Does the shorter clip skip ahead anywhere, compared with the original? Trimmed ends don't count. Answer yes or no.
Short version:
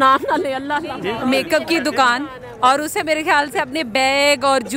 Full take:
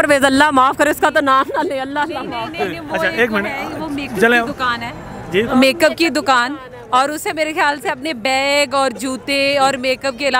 yes